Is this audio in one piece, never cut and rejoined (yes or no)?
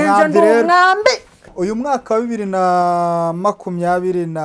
no